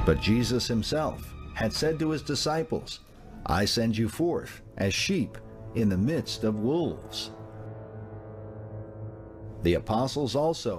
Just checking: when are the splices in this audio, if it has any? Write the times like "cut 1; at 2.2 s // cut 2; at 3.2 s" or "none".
cut 1; at 8.6 s